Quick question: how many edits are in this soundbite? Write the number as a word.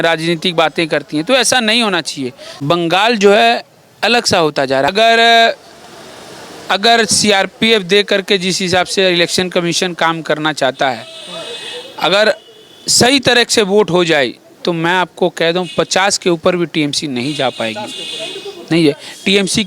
two